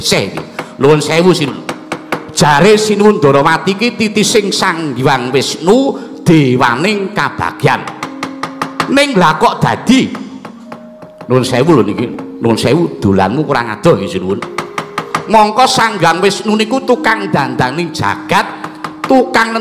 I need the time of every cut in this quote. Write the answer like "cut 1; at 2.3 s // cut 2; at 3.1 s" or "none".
cut 1; at 1.6 s